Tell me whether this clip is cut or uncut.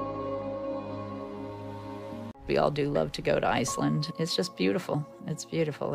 cut